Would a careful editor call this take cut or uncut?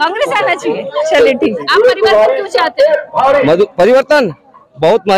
cut